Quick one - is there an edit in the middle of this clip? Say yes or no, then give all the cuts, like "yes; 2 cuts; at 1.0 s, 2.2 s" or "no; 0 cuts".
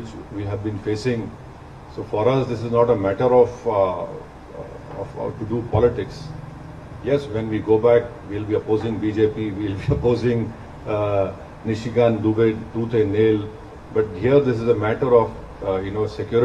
no; 0 cuts